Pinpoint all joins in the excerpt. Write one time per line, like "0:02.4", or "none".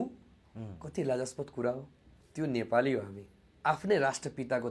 0:03.4